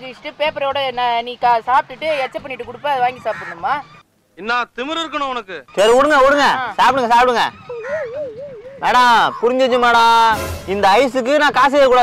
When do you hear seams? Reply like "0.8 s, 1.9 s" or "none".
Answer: none